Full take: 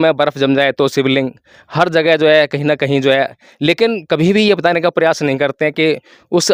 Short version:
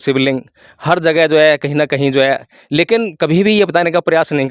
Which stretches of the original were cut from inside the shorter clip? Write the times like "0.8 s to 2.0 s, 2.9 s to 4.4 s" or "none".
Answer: none